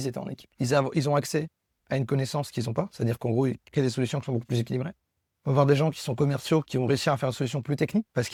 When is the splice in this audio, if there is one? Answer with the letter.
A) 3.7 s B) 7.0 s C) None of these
C